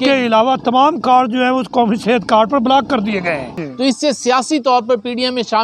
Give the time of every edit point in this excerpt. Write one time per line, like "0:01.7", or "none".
0:03.6